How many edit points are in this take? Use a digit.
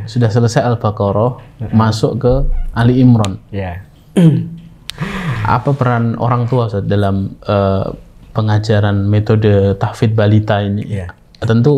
1